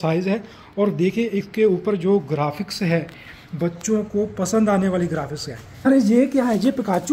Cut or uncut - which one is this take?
cut